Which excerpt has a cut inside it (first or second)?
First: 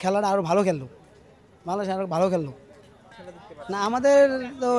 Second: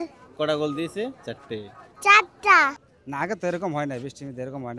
second